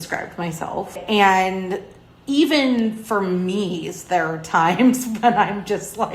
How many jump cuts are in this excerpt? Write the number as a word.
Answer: one